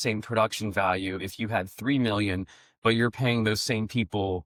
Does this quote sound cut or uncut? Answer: uncut